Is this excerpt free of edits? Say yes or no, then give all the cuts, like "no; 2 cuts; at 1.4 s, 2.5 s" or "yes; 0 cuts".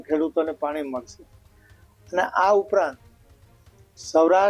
yes; 0 cuts